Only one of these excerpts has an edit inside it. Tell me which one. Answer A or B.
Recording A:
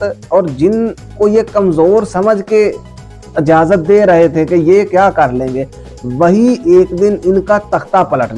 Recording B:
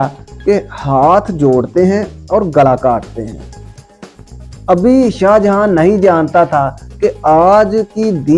B